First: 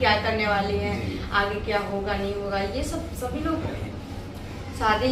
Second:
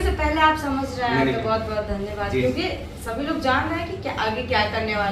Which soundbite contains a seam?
first; 1 cut; at 3.7 s

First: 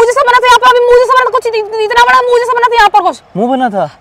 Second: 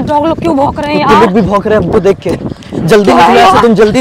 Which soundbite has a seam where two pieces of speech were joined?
second; 1 cut; at 2.7 s

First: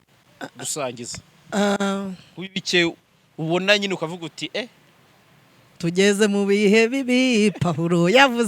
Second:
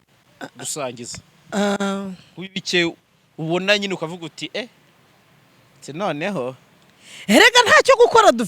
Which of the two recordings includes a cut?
first; 1 cut; at 5.8 s

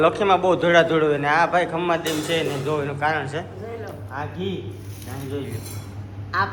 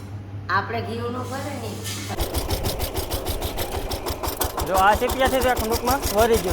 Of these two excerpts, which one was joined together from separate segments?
second; 1 cut; at 2.2 s

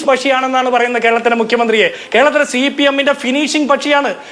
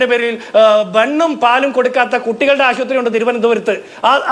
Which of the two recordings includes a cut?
first; 1 cut; at 2.1 s

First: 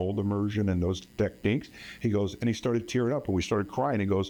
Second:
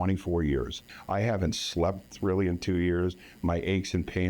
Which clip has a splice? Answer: second; 1 cut; at 0.9 s

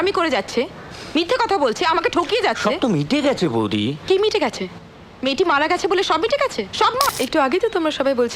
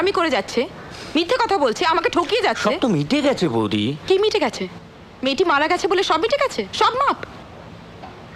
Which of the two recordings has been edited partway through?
first; 1 cut; at 7.1 s

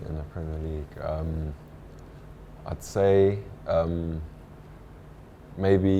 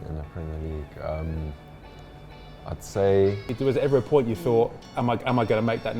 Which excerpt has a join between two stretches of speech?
second; 2 cuts; at 3.5 s, 4.8 s

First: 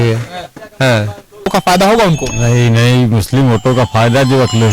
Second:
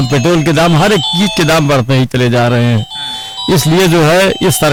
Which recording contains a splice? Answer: first; 1 cut; at 1.2 s

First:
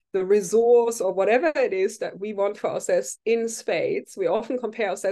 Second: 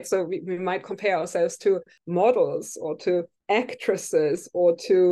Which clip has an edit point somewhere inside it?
second; 2 cuts; at 1.9 s, 3.3 s

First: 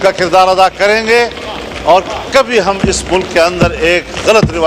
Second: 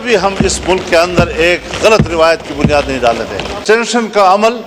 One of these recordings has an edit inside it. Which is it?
second; 1 cut; at 3.5 s

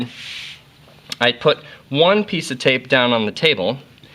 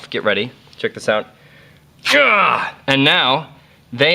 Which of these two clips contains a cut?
second; 1 cut; at 2.4 s

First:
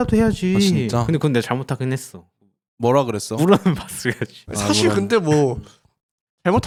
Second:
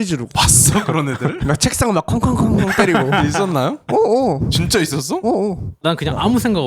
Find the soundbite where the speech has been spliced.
second; 1 cut; at 5.7 s

